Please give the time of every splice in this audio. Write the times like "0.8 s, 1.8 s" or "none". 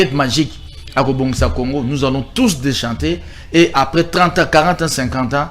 none